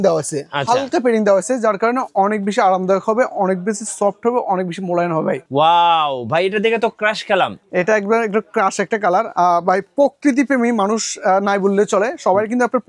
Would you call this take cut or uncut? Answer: cut